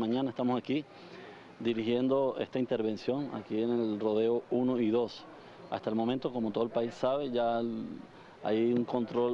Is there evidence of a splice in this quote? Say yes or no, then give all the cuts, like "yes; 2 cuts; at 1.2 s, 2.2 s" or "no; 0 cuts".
no; 0 cuts